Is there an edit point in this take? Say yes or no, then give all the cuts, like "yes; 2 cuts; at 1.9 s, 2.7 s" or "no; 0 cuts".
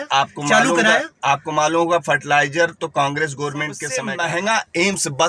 yes; 1 cut; at 4.0 s